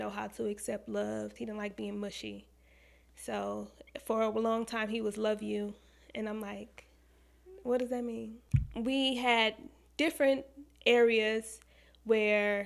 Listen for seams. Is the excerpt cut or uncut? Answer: cut